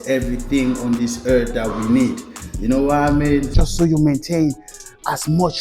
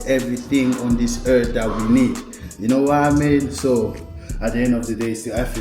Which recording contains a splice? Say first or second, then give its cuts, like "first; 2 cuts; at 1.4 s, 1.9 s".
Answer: first; 1 cut; at 3.5 s